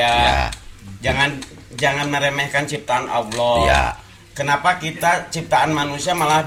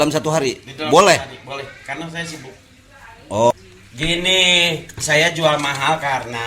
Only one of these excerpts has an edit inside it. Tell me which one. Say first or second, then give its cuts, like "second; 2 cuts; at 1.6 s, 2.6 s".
second; 1 cut; at 3.5 s